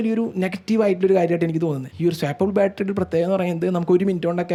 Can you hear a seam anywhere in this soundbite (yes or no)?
no